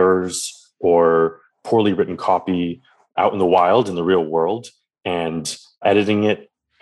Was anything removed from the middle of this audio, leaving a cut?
yes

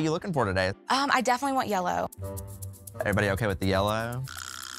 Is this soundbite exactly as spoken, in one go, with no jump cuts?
yes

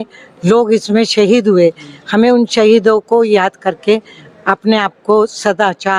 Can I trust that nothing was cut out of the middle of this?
yes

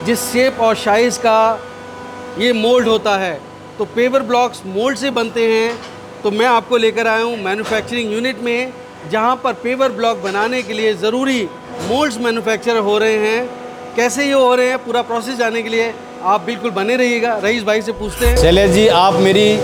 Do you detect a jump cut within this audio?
no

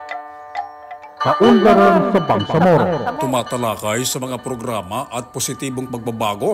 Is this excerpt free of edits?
no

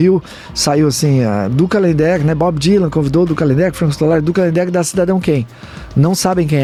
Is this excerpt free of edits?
yes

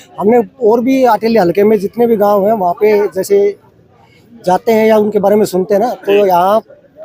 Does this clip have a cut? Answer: no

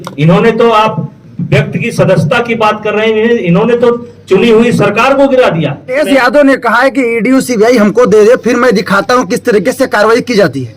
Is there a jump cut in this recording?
yes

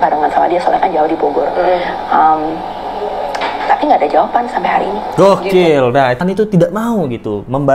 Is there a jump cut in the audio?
yes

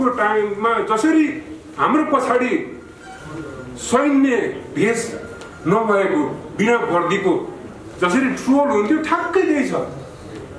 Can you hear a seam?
no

